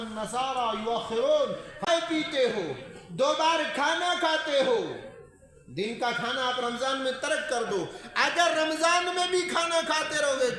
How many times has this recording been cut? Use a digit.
1